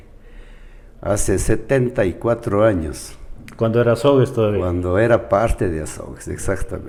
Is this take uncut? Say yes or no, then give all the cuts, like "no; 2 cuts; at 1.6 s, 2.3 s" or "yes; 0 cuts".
yes; 0 cuts